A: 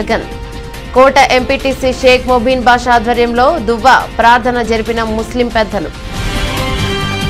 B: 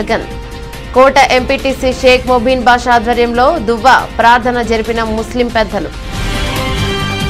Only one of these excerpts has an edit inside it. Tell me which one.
A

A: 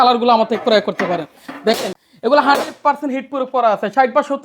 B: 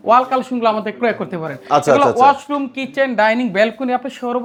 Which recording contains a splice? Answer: A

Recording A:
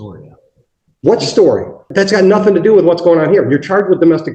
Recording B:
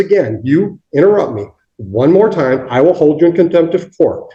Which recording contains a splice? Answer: A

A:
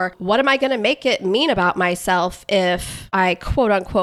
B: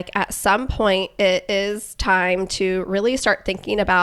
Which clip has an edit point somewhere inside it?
A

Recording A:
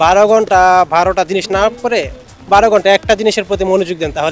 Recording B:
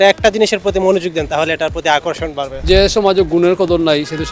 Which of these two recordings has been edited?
B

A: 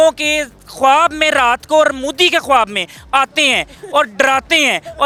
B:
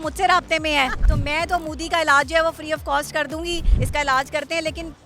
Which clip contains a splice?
B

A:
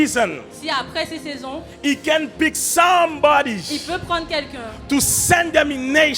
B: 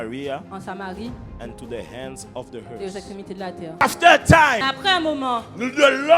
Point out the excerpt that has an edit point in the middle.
B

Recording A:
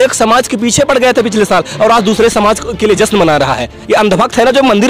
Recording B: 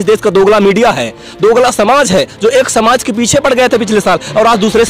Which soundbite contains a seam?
A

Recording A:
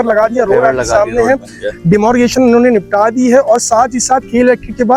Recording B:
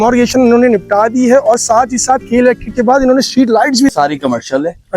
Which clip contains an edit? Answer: B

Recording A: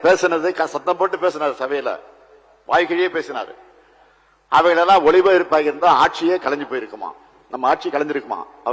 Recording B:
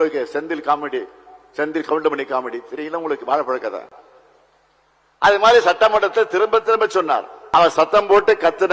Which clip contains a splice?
B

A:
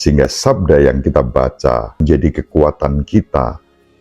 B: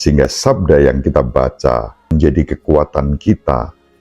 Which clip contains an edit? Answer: A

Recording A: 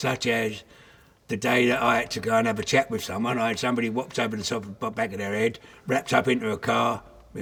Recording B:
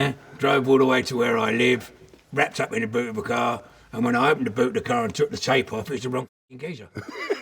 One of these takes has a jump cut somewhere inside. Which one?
B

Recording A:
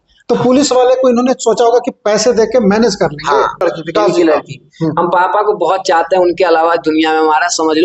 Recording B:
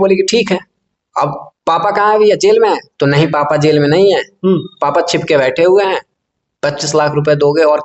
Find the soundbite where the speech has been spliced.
A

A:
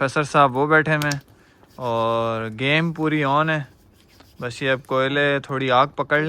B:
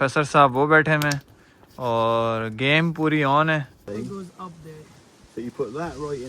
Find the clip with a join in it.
B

